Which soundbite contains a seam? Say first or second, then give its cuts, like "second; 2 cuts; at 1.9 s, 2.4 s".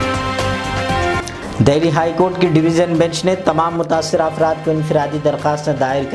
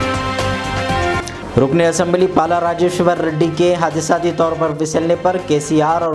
second; 1 cut; at 1.3 s